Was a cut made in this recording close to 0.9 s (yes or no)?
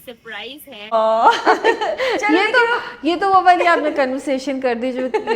yes